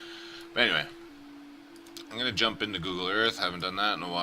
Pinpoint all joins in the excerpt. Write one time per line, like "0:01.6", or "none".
0:01.0